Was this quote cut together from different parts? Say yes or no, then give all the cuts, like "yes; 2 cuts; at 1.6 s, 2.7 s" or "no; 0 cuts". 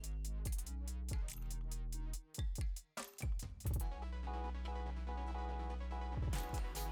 no; 0 cuts